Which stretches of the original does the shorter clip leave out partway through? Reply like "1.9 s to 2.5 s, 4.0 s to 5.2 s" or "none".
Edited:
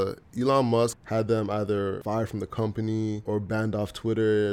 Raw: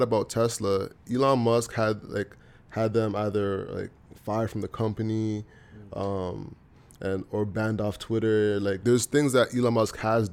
1.7 s to 2.6 s, 3.7 s to 4.2 s, 5.4 s to 7.3 s